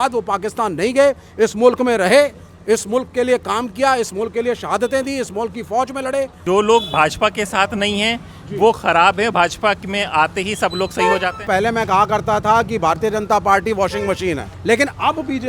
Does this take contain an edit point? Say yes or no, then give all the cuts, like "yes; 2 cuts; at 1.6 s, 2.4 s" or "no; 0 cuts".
yes; 3 cuts; at 6.4 s, 11.5 s, 14.5 s